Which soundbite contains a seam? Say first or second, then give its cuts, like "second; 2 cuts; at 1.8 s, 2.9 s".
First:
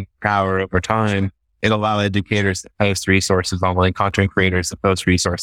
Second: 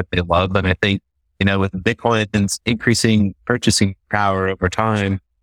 second; 1 cut; at 2.6 s